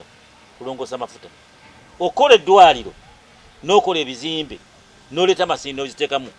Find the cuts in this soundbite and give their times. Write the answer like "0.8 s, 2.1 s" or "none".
none